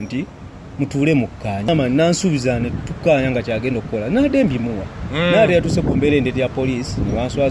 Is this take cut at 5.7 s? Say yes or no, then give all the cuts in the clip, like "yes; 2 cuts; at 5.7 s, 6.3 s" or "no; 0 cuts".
no; 1 cut; at 1.7 s